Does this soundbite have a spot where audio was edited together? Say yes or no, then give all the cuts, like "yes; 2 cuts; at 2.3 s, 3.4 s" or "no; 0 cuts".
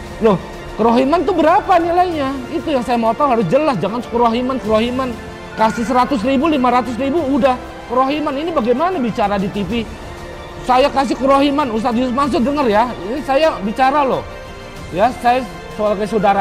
no; 0 cuts